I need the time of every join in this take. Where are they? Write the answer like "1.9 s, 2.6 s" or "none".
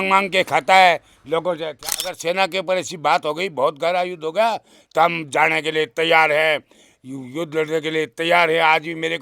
1.7 s